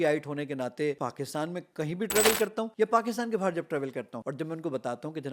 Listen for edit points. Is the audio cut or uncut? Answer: cut